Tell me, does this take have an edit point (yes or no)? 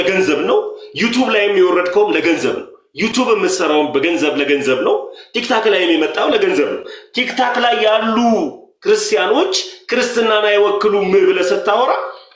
no